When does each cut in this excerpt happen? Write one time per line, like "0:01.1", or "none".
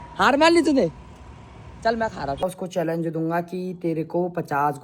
0:02.4